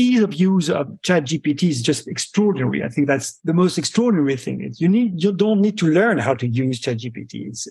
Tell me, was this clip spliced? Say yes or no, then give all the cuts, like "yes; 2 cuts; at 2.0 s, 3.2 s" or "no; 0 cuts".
no; 0 cuts